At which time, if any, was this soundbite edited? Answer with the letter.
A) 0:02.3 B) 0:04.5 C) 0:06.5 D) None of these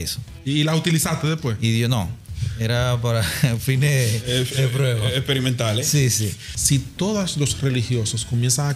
C